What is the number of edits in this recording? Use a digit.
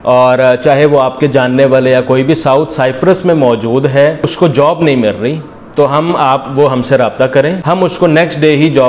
2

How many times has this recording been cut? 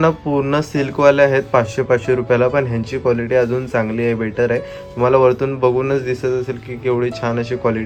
0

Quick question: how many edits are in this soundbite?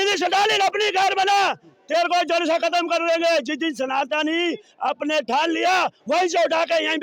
0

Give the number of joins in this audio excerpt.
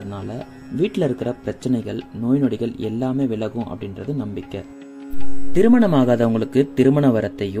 0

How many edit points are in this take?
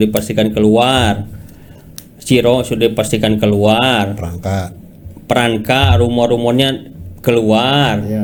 0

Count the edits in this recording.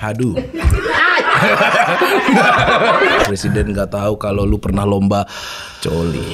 1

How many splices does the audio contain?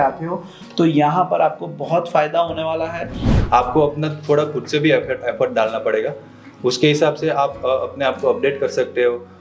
1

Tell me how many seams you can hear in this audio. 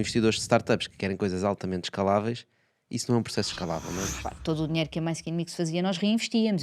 1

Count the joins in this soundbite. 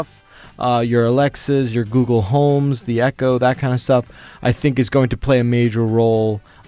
0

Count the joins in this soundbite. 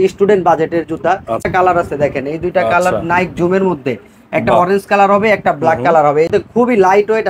2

